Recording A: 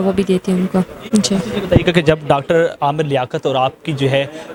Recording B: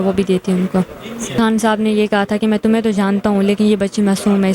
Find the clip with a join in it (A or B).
B